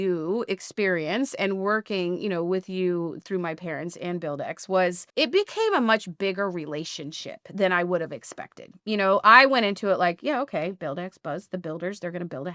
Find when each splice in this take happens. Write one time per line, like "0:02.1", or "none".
0:05.0